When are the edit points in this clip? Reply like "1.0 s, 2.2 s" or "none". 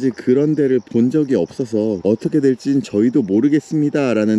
2.0 s

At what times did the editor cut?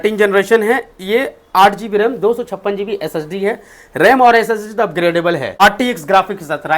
5.6 s

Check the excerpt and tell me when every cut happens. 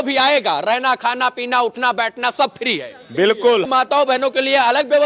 3.7 s

